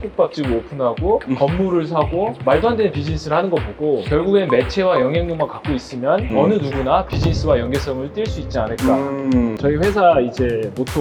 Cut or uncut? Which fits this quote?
cut